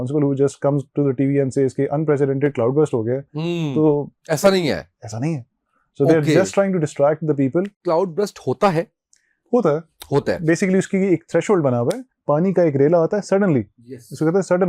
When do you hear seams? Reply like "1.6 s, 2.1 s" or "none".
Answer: 7.7 s, 12.1 s